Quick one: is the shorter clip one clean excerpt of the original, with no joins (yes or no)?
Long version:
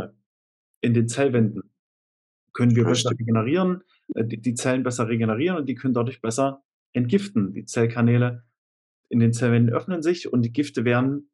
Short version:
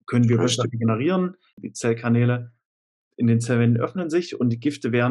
no